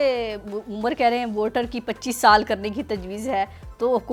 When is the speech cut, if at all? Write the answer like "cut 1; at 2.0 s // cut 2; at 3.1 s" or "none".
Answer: none